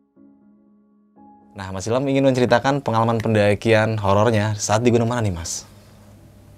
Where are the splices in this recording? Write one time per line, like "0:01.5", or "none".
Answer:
0:01.7